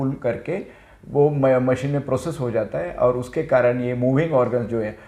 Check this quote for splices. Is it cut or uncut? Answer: uncut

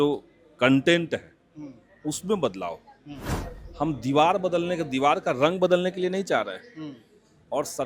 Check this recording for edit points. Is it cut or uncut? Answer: uncut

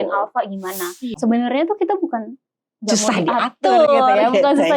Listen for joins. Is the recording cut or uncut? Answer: cut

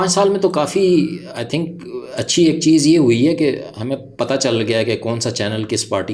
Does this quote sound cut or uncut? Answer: uncut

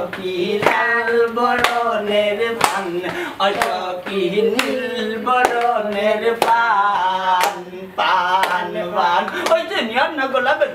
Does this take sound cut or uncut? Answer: uncut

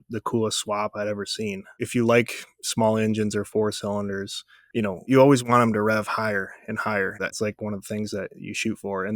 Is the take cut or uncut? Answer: cut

